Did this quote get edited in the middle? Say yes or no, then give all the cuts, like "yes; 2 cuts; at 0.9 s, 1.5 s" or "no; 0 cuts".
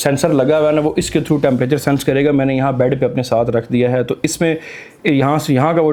no; 0 cuts